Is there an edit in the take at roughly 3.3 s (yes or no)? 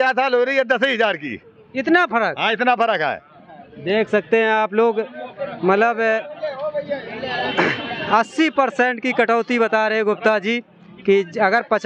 no